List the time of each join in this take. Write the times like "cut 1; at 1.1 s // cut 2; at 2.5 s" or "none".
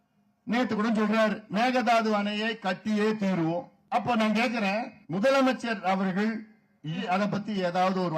cut 1; at 1.4 s // cut 2; at 3.8 s // cut 3; at 5.0 s // cut 4; at 7.0 s